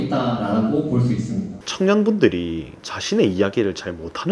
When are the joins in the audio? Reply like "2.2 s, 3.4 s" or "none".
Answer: 1.5 s